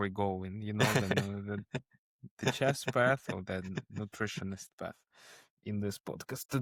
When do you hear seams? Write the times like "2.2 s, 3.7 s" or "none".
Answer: none